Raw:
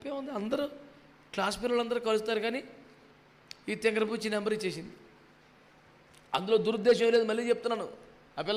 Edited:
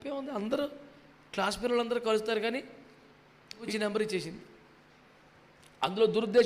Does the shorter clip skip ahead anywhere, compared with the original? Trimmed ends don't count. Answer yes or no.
yes